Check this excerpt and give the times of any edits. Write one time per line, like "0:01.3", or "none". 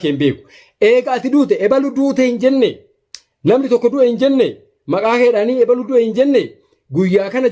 none